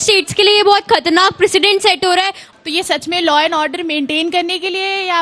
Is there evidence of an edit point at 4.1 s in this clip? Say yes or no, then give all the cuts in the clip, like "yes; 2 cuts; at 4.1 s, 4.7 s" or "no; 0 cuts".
no; 1 cut; at 2.4 s